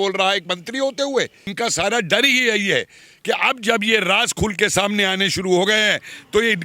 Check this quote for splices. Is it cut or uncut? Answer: cut